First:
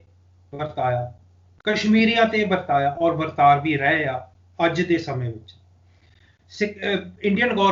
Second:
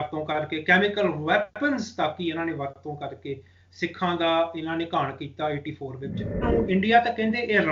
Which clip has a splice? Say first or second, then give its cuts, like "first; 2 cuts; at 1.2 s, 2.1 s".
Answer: second; 1 cut; at 6.4 s